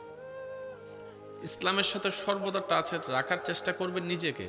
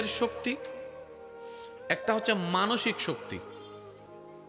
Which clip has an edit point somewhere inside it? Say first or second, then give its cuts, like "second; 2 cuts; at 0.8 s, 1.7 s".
first; 1 cut; at 1.6 s